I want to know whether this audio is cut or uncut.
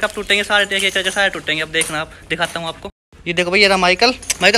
uncut